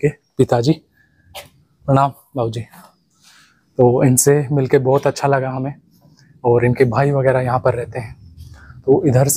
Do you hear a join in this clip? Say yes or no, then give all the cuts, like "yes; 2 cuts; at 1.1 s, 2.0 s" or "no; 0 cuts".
no; 0 cuts